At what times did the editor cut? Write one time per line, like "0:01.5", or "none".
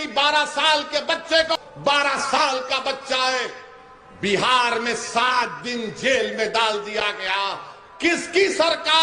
0:01.5